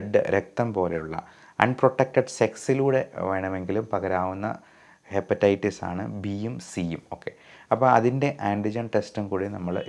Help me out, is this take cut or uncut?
uncut